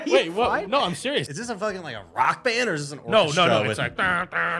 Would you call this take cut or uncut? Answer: cut